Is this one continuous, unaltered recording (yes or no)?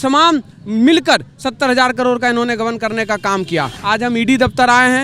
no